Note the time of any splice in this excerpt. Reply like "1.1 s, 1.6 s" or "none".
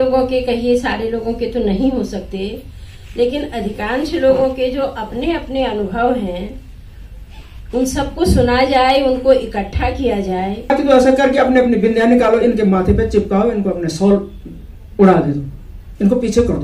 10.7 s